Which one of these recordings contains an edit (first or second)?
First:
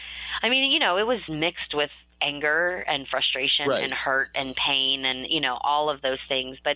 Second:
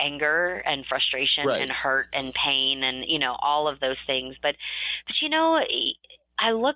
first